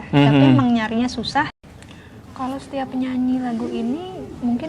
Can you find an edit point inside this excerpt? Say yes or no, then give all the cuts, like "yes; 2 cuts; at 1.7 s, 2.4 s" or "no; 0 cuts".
yes; 1 cut; at 1.5 s